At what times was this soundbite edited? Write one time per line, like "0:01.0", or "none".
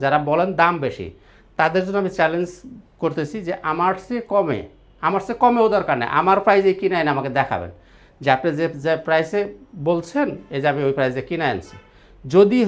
none